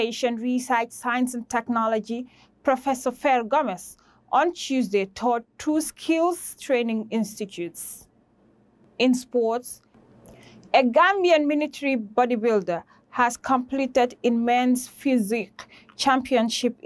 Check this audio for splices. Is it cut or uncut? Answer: uncut